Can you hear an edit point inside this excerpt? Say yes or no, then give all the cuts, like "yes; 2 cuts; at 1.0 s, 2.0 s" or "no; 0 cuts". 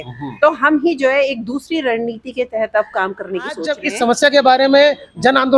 yes; 1 cut; at 3.9 s